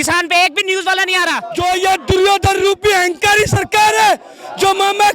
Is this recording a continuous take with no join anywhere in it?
no; 1 cut; at 1.4 s

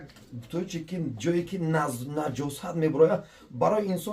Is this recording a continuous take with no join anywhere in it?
yes; 0 cuts

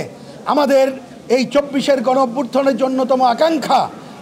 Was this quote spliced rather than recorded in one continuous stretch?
no; 0 cuts

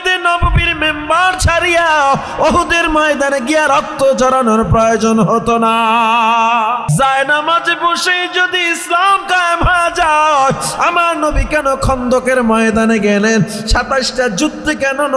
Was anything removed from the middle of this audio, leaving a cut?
yes; 1 cut; at 6.9 s

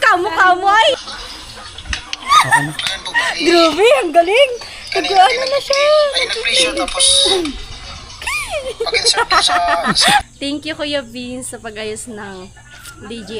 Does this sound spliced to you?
yes; 2 cuts; at 0.9 s, 10.2 s

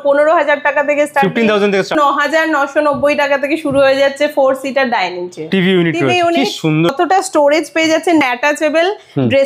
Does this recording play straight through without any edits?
no; 4 cuts; at 1.9 s, 5.5 s, 6.9 s, 8.2 s

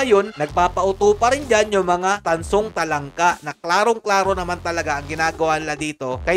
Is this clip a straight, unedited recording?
yes; 0 cuts

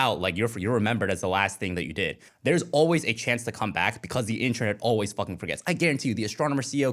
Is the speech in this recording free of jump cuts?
no; 1 cut; at 2.2 s

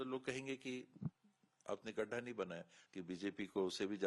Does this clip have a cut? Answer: yes; 1 cut; at 2.8 s

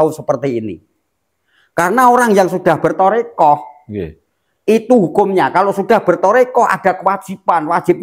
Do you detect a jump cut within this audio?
no; 0 cuts

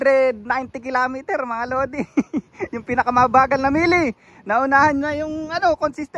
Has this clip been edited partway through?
no; 0 cuts

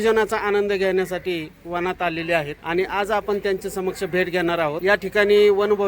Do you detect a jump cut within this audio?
yes; 2 cuts; at 2.6 s, 4.8 s

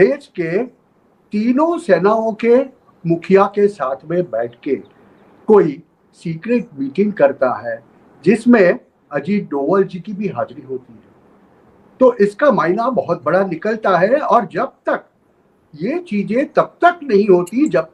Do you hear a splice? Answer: no; 0 cuts

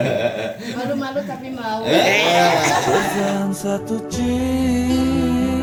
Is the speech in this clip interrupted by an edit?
no; 0 cuts

